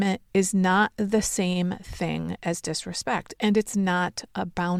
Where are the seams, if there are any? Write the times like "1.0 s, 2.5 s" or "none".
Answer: none